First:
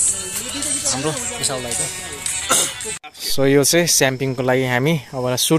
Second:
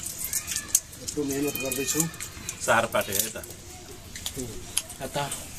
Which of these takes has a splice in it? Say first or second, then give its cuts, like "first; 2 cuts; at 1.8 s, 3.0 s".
first; 1 cut; at 3.4 s